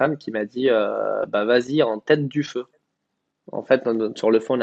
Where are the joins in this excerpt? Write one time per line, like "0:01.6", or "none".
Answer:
none